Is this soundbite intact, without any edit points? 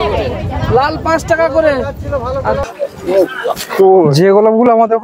no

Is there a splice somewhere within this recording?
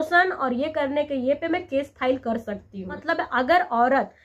yes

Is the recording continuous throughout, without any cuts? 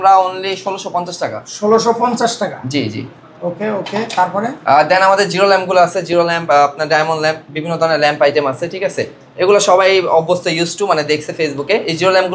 yes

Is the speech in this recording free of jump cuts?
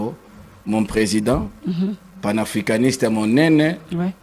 yes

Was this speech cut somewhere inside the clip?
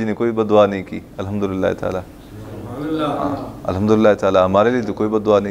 no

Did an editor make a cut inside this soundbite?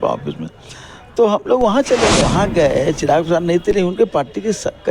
yes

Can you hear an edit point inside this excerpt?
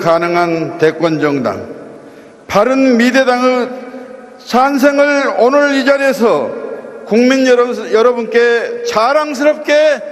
no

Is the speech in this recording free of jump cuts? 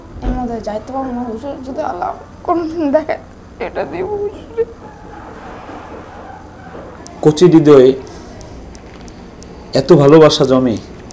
no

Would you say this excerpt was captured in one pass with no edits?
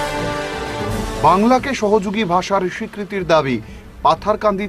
no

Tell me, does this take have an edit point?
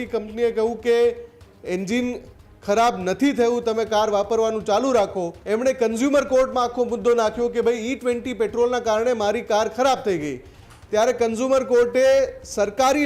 yes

